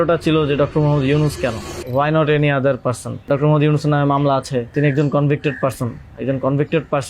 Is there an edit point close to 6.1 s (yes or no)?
no